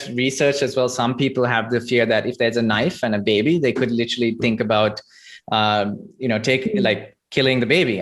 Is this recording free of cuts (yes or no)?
yes